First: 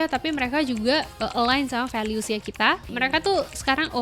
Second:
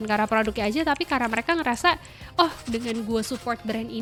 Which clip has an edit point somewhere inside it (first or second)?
first